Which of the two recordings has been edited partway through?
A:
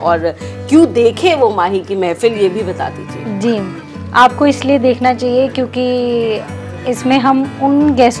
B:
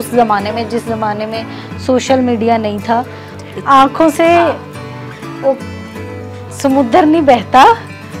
B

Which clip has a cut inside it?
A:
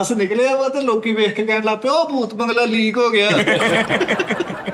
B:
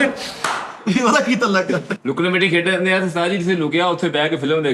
B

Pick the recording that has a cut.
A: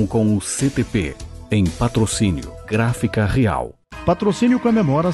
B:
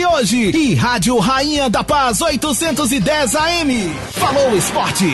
A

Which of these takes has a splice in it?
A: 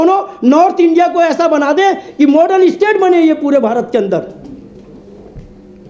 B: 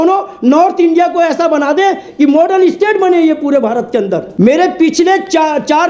B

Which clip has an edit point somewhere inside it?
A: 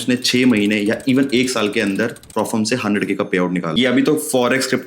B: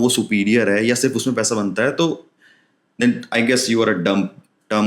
A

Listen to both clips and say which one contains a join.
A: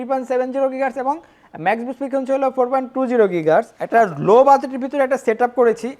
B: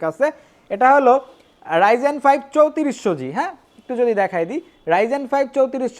A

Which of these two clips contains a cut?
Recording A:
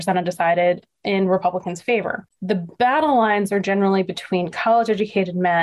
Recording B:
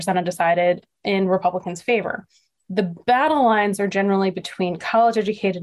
A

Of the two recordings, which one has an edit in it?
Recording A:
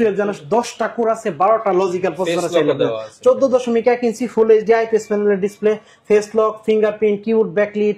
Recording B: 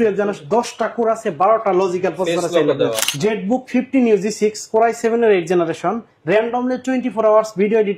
B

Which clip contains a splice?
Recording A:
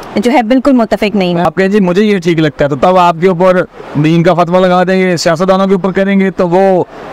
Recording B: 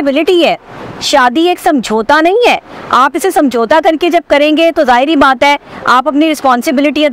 A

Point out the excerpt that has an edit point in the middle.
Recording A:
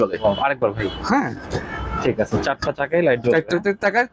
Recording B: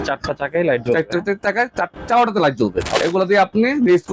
B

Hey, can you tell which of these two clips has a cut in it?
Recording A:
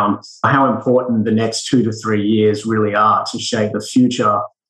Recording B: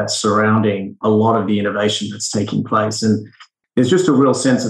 B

